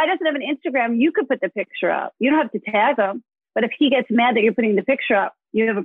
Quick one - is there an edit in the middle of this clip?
no; 0 cuts

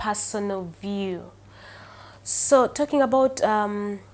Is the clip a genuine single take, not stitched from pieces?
yes; 0 cuts

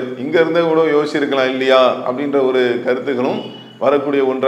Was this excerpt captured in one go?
yes; 0 cuts

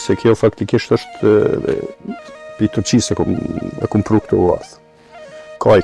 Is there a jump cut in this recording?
no; 0 cuts

